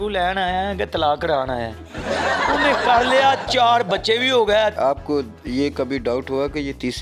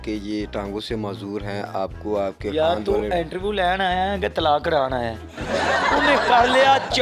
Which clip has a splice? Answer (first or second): first